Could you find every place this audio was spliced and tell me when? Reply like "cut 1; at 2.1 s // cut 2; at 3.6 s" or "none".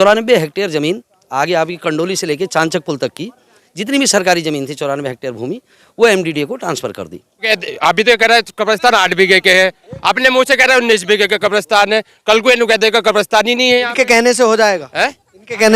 cut 1; at 7.5 s